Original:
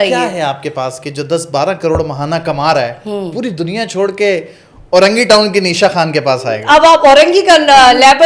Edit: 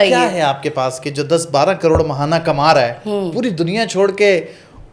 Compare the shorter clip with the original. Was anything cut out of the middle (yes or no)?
no